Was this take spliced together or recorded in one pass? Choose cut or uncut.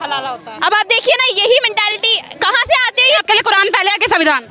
cut